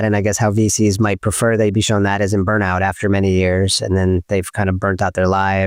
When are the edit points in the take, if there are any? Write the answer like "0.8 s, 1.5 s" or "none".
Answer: none